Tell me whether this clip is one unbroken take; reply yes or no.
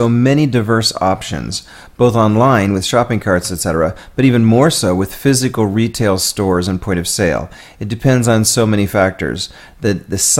no